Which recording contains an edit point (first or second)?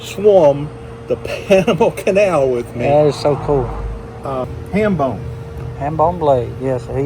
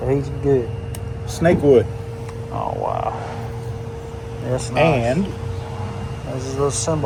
first